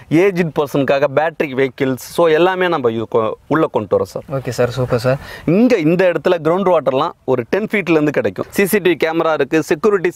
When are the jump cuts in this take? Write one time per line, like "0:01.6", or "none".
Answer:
0:05.3
0:08.4